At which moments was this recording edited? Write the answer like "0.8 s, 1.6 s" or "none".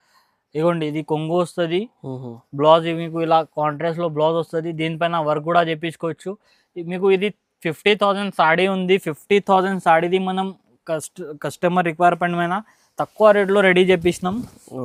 none